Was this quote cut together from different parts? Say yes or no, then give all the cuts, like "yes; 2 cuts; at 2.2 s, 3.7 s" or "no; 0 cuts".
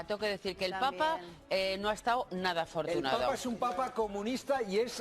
no; 0 cuts